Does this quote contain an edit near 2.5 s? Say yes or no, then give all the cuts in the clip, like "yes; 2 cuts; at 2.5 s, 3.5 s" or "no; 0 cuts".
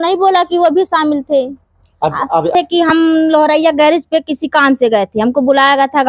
yes; 1 cut; at 2.5 s